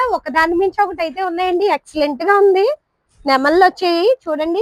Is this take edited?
no; 0 cuts

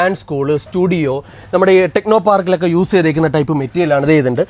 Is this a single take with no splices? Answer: yes; 0 cuts

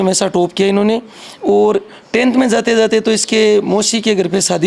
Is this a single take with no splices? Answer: yes; 0 cuts

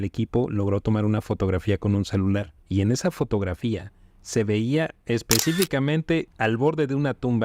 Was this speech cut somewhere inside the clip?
yes; 2 cuts; at 2.6 s, 6.3 s

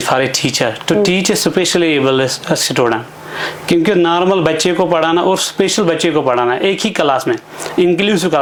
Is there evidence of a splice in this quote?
no; 0 cuts

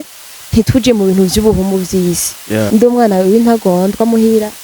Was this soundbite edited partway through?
yes; 1 cut; at 2.7 s

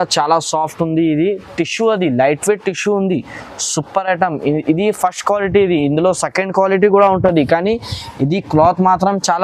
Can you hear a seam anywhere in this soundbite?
no; 0 cuts

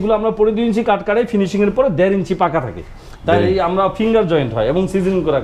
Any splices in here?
no; 0 cuts

